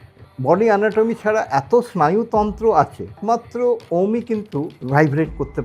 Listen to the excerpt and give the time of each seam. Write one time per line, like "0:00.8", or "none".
0:03.2
0:04.8